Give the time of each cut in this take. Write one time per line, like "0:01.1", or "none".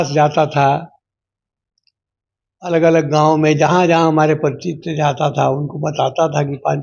none